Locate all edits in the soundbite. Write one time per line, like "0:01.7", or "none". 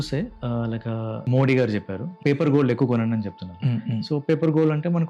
0:01.2
0:02.1